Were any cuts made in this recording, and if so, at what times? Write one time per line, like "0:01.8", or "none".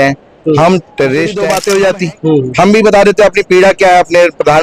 0:01.4